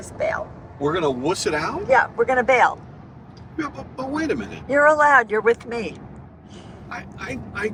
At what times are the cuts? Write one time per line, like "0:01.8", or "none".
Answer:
none